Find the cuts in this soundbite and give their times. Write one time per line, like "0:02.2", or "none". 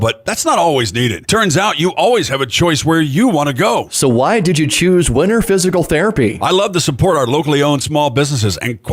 none